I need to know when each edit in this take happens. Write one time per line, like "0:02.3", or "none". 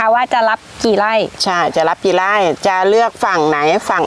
none